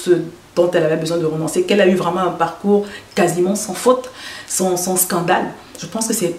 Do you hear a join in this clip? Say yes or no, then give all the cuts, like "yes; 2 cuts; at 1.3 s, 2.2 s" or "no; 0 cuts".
no; 0 cuts